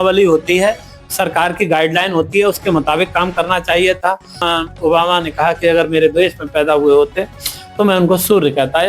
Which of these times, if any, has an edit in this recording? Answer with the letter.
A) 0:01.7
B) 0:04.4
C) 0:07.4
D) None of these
B